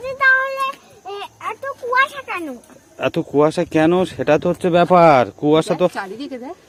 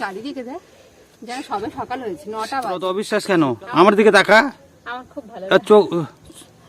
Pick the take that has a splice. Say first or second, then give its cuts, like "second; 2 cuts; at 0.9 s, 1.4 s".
second; 1 cut; at 3.0 s